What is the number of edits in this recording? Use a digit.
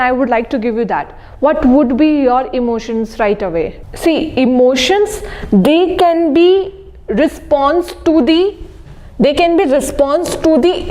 1